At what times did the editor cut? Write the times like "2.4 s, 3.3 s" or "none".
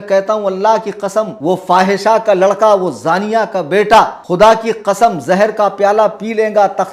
1.3 s, 4.2 s